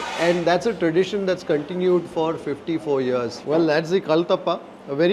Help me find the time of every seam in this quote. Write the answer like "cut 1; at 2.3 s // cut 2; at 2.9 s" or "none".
cut 1; at 3.4 s